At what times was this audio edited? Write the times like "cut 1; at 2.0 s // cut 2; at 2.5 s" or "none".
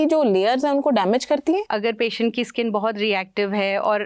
cut 1; at 1.7 s